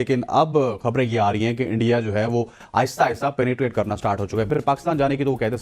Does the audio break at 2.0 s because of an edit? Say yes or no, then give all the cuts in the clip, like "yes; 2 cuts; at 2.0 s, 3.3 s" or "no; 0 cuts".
no; 1 cut; at 4.5 s